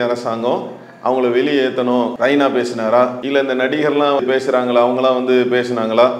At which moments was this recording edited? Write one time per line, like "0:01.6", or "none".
0:02.1
0:03.2
0:04.2